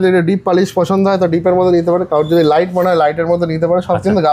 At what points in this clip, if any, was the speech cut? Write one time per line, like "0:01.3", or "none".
none